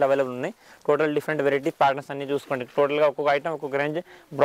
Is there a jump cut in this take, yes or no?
no